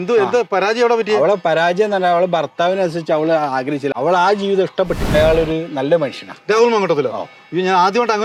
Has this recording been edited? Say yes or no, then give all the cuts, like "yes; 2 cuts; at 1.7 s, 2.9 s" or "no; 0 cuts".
yes; 2 cuts; at 3.9 s, 5.1 s